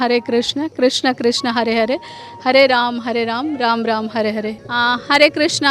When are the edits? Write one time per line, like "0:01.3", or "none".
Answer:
0:04.6